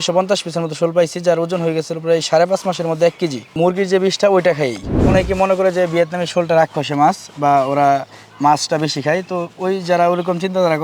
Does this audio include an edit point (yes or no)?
yes